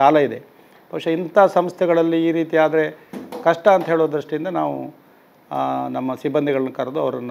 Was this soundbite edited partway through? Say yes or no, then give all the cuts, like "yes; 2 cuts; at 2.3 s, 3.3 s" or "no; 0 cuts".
no; 0 cuts